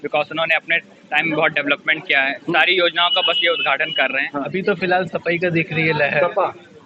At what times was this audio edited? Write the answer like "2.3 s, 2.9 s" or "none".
4.5 s